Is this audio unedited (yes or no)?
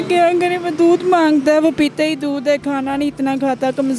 yes